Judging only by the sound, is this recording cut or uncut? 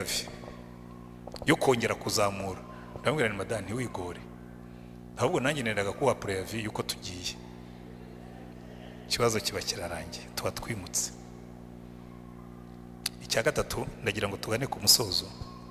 uncut